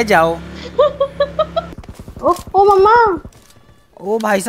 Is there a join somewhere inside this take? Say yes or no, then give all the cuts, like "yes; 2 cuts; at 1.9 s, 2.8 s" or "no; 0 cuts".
yes; 1 cut; at 1.8 s